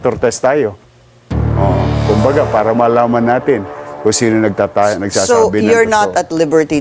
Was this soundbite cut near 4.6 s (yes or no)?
no